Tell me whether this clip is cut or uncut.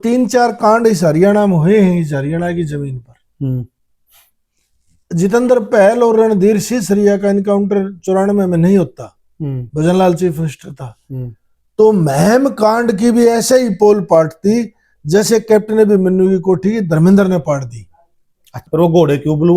cut